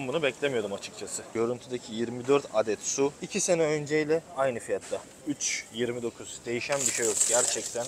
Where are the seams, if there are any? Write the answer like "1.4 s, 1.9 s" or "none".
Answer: 1.2 s, 3.2 s

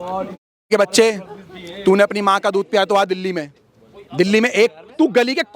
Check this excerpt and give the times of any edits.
none

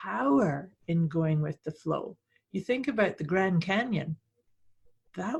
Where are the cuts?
none

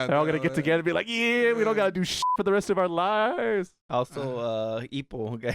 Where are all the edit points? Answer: 2.3 s, 3.8 s

